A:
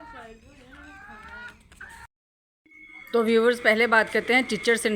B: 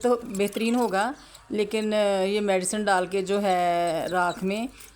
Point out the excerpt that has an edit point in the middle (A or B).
B